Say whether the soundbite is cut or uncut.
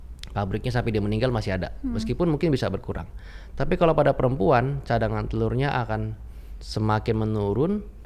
uncut